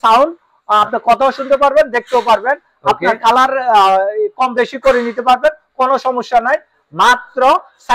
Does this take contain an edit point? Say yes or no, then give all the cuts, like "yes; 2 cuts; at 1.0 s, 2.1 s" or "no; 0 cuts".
no; 0 cuts